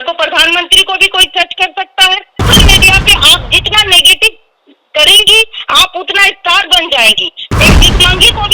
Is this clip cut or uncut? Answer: cut